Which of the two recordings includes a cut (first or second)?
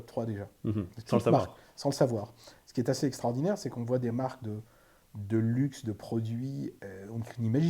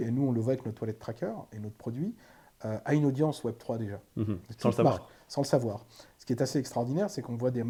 first